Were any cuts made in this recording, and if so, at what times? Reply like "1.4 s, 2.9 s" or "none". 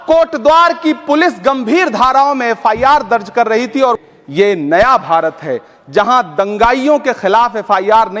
4.0 s